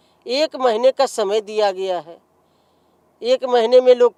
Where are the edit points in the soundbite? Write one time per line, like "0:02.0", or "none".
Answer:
none